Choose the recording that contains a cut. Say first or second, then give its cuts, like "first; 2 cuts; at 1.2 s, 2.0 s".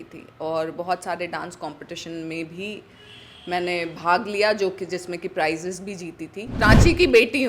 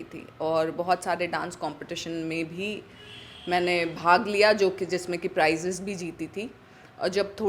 first; 1 cut; at 6.4 s